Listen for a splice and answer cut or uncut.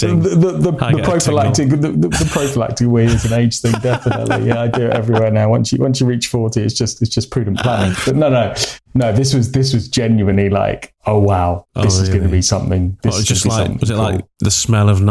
cut